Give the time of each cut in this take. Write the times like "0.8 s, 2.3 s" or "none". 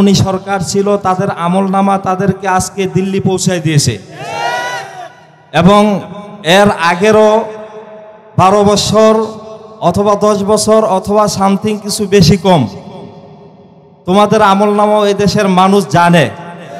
none